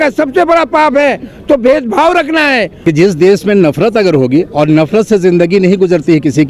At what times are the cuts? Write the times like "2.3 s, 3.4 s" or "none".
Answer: 2.7 s